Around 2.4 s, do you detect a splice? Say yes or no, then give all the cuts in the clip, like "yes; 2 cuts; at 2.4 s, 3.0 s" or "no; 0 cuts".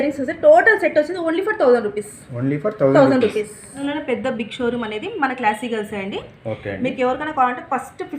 no; 1 cut; at 3.8 s